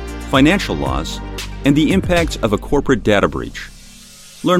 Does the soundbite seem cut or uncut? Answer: uncut